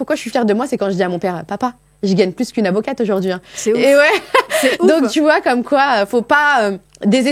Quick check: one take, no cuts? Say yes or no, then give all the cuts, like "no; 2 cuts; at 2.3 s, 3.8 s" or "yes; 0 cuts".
yes; 0 cuts